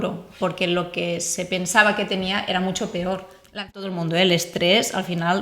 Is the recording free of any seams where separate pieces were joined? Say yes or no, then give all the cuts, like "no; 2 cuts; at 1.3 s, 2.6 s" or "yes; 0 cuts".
no; 1 cut; at 3.8 s